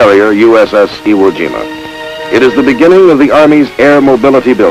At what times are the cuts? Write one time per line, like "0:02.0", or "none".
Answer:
0:01.9